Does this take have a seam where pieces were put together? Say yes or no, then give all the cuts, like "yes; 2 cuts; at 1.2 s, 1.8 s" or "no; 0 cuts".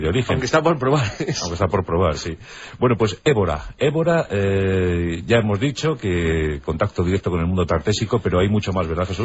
yes; 1 cut; at 5.9 s